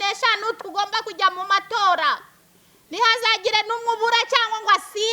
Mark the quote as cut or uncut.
uncut